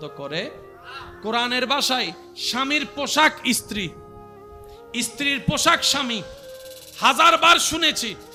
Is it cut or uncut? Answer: uncut